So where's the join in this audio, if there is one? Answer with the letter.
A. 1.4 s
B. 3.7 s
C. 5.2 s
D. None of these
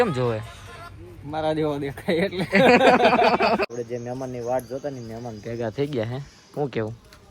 B